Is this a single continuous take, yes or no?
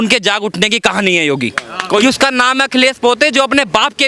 no